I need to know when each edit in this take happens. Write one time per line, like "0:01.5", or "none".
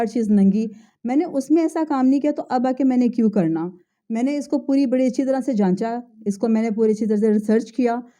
none